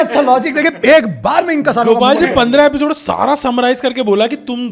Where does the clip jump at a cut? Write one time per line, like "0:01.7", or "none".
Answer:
none